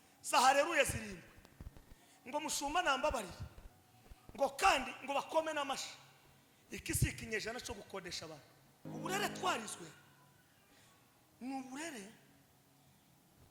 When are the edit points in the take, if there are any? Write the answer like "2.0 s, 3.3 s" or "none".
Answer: 8.9 s